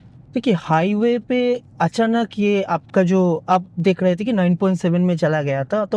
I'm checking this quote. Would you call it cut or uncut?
uncut